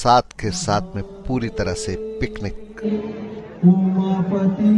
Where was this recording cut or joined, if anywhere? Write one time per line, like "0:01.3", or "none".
none

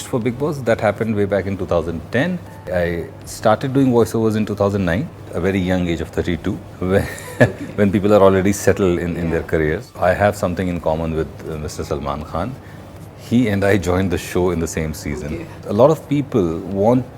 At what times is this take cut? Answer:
0:02.7
0:05.3
0:06.7
0:09.9
0:15.6

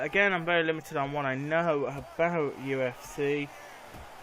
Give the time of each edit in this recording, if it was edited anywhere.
0:02.0

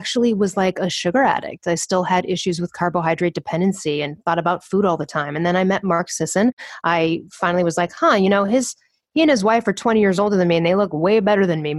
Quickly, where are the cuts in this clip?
0:06.3

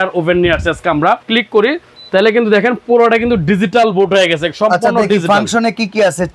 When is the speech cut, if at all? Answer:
0:01.2

